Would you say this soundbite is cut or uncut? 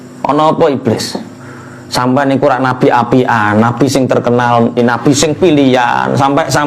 cut